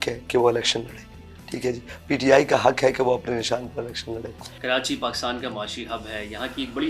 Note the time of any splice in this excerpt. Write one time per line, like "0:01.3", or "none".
none